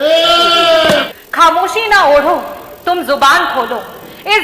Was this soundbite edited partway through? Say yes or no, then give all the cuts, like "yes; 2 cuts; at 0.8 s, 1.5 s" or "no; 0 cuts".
yes; 1 cut; at 1.1 s